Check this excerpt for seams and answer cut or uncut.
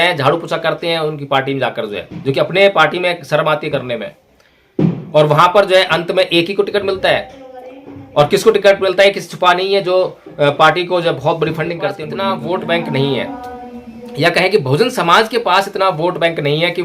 cut